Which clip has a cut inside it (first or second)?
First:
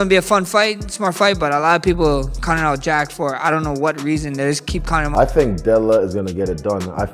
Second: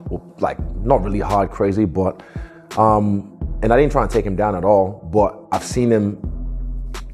first